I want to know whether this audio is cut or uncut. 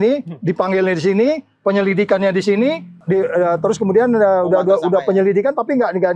cut